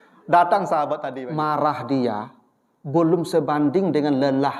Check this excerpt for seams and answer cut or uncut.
cut